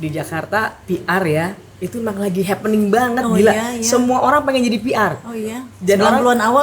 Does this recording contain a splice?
no; 0 cuts

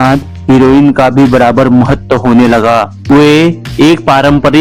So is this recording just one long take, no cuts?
yes; 0 cuts

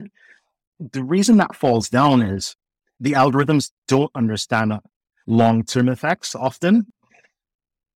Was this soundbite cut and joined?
no; 0 cuts

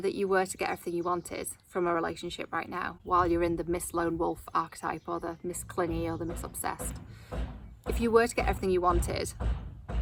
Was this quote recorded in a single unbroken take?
yes; 0 cuts

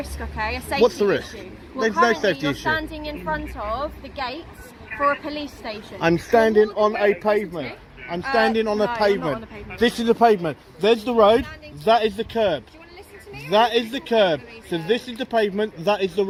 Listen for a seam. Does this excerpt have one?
no; 0 cuts

